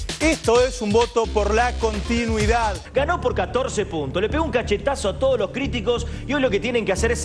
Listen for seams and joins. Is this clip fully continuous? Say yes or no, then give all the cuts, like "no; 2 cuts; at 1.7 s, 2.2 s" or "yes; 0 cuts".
no; 1 cut; at 2.8 s